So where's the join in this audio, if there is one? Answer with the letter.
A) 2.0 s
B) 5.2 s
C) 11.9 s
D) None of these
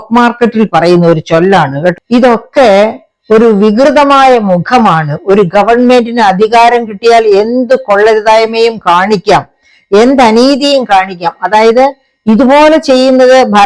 A